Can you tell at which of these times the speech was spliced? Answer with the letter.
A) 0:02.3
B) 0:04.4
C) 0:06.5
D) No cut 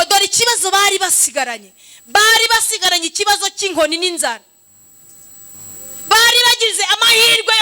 D